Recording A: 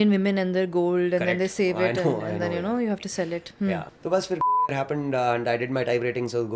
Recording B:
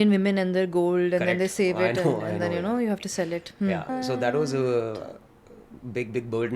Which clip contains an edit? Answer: B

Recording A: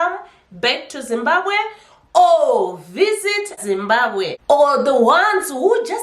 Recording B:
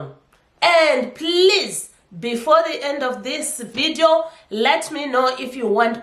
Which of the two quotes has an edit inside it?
A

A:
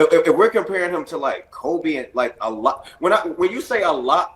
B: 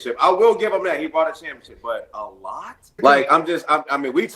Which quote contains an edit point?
B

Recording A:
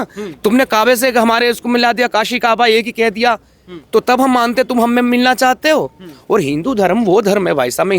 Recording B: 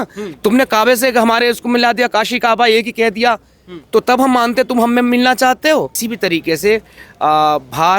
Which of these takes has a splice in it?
B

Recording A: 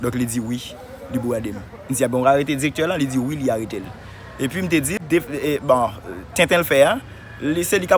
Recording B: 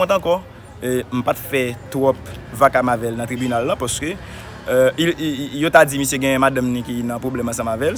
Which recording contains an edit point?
A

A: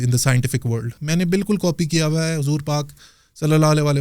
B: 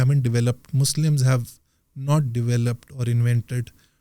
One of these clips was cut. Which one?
A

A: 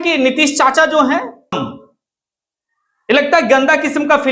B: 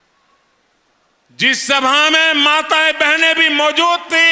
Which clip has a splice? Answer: A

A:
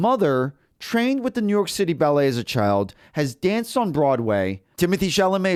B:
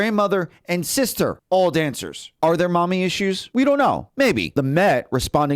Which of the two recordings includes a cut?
B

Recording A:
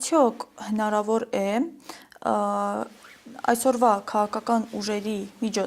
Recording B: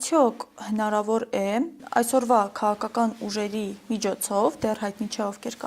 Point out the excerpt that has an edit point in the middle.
B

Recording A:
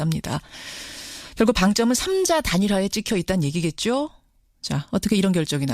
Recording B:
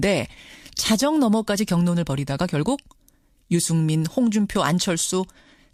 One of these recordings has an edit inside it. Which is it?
A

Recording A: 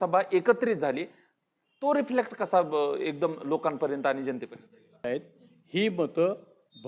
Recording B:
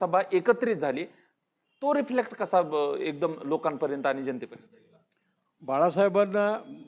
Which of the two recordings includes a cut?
A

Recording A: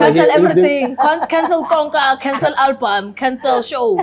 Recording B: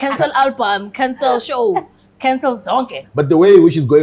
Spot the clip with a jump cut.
B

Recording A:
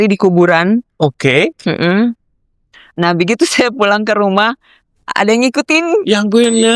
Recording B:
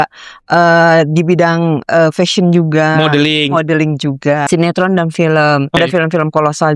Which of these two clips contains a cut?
B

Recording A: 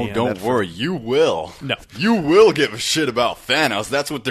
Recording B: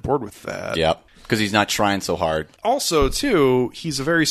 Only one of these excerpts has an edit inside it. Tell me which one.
B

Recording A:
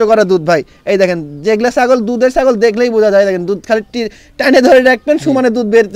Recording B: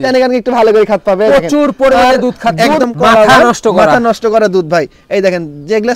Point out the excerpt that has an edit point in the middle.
B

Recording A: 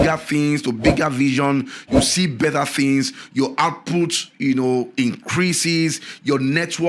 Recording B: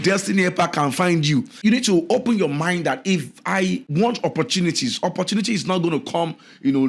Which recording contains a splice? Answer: B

